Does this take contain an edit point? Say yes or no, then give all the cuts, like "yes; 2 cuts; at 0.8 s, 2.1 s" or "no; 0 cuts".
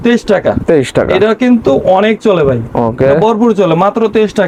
no; 0 cuts